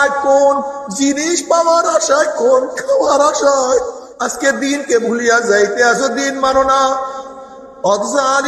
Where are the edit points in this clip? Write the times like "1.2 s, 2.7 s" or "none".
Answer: 4.0 s